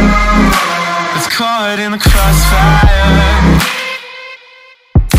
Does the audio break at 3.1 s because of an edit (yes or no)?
no